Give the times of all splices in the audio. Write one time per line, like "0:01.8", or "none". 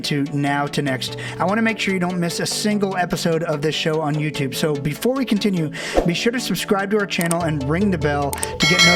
none